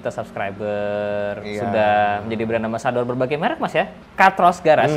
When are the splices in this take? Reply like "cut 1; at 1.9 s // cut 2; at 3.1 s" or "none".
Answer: cut 1; at 4.0 s